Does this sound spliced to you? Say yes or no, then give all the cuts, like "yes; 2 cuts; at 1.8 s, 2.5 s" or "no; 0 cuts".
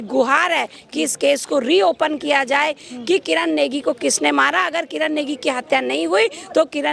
no; 0 cuts